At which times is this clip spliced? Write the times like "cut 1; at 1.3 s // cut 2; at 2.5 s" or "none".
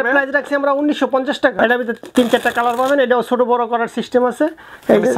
cut 1; at 1.6 s